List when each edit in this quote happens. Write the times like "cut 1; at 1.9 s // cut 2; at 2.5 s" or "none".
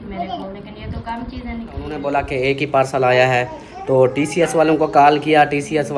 cut 1; at 1.9 s